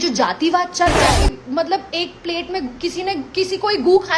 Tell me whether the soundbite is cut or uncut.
cut